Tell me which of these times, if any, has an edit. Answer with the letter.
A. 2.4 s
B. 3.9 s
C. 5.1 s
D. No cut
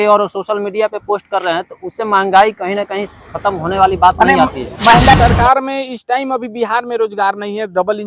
C